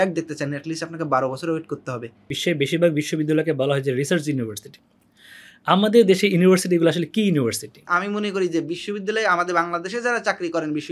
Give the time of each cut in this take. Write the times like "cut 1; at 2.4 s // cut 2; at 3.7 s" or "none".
cut 1; at 2.3 s // cut 2; at 7.9 s